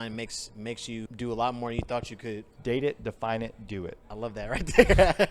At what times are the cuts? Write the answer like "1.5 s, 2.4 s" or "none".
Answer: 1.1 s, 2.5 s, 4.0 s

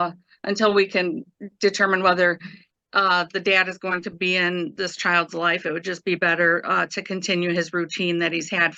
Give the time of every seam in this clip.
none

